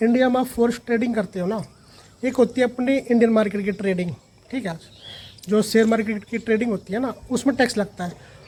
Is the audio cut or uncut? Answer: uncut